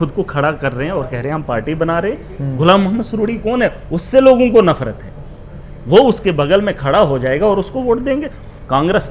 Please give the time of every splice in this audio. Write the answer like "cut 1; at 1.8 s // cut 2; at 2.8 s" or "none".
none